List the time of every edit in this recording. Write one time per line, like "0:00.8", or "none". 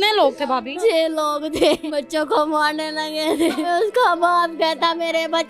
0:00.8
0:01.8
0:03.7